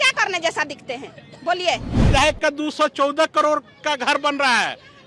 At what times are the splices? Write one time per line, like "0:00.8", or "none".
0:01.9